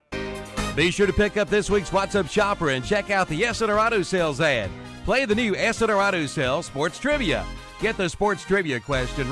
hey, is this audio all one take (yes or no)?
no